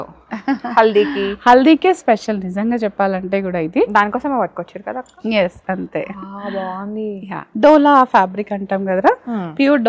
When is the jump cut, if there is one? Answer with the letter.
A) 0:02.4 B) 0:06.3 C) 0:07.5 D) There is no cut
D